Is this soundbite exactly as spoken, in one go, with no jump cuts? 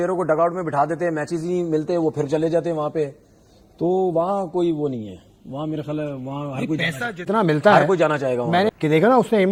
yes; 0 cuts

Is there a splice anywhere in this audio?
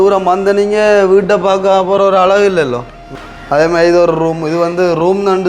yes; 1 cut; at 3.0 s

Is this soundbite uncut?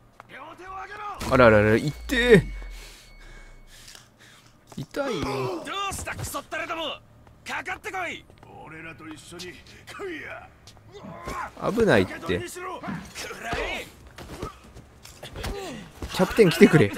yes; 0 cuts

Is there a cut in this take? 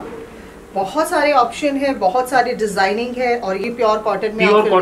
yes; 1 cut; at 3.6 s

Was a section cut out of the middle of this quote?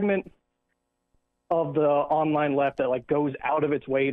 yes; 1 cut; at 2.7 s

